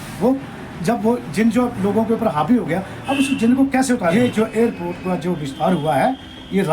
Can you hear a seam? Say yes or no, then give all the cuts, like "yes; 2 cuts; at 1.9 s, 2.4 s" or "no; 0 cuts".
yes; 1 cut; at 4.1 s